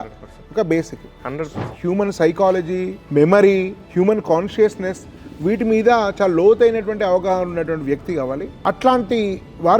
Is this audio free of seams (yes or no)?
no